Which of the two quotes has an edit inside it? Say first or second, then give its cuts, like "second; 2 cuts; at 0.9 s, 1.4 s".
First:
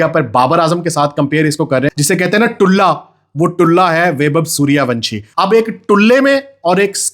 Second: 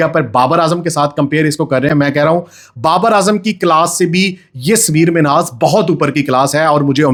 first; 2 cuts; at 1.9 s, 5.2 s